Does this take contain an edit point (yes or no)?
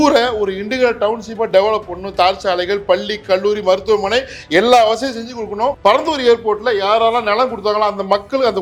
yes